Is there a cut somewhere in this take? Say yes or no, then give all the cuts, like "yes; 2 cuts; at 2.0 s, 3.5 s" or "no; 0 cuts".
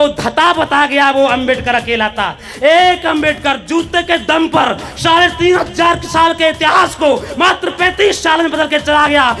no; 0 cuts